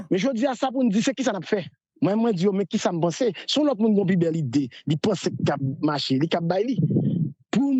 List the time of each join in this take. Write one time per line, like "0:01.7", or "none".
none